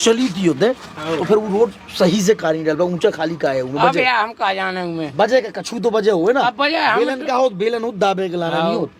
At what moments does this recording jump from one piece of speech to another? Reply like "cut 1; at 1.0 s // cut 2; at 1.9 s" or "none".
none